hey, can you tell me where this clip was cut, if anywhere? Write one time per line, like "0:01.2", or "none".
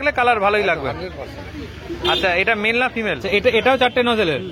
0:03.2